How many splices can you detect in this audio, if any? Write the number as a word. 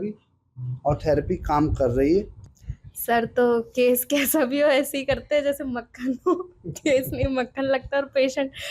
one